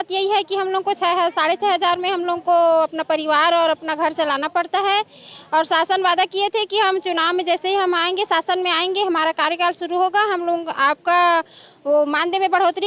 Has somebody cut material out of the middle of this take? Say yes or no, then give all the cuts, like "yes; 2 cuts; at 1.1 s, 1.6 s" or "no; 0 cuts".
no; 0 cuts